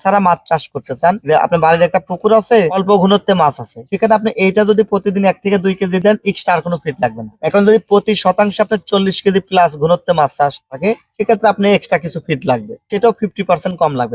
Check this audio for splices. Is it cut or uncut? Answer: uncut